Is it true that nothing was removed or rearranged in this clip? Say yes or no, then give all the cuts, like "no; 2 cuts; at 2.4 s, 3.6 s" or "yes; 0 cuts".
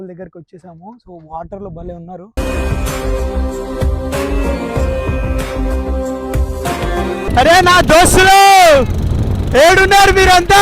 no; 2 cuts; at 2.3 s, 7.3 s